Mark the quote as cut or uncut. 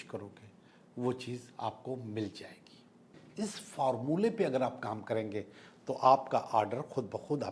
cut